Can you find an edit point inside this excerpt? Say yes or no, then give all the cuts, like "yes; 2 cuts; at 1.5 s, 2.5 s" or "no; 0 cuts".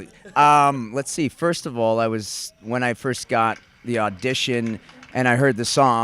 yes; 1 cut; at 4.7 s